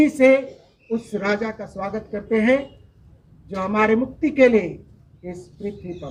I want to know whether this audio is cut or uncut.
uncut